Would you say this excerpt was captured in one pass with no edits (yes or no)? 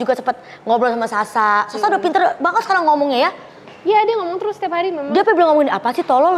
yes